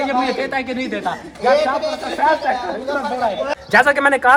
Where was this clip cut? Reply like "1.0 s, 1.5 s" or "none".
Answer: none